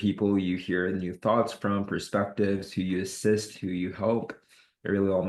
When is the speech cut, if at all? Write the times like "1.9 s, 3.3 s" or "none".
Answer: none